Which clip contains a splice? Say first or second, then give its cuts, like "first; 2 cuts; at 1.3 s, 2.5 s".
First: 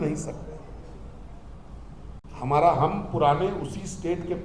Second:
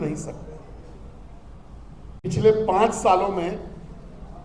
second; 1 cut; at 2.2 s